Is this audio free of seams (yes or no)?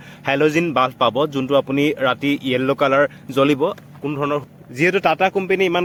yes